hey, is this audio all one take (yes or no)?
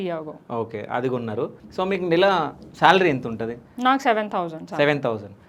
no